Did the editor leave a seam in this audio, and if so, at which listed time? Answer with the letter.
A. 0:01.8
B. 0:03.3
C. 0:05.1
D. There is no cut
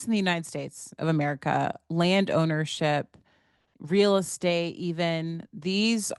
D